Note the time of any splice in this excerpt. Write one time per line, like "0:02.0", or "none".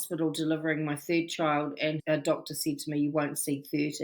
0:02.0